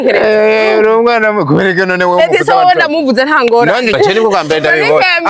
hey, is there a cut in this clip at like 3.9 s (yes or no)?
yes